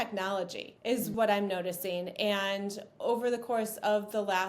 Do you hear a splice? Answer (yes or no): yes